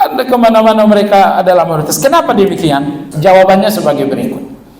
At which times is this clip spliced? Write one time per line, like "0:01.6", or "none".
0:03.0